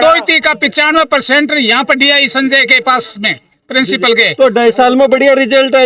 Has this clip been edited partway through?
no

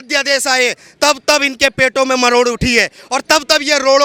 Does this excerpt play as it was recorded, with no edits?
yes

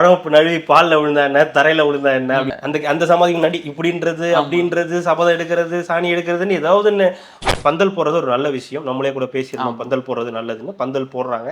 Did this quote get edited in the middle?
yes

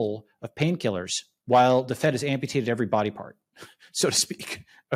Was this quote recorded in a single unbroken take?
no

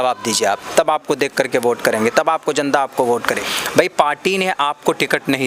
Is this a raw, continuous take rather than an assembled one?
no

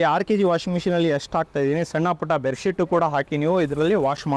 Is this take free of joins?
yes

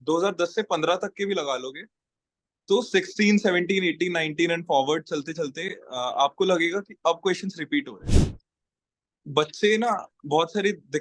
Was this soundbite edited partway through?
yes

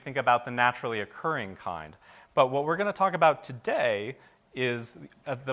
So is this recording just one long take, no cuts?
yes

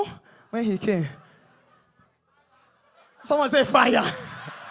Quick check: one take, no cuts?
yes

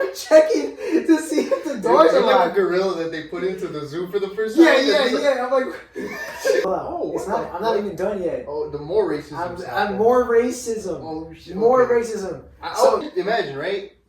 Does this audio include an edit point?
yes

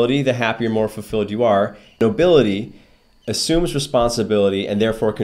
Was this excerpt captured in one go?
no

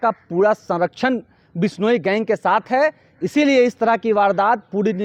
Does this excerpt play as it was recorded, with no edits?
yes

